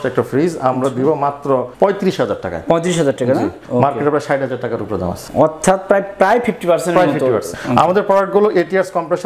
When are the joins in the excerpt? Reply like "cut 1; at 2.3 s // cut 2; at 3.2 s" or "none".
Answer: cut 1; at 1.7 s // cut 2; at 3.6 s // cut 3; at 5.2 s // cut 4; at 7.5 s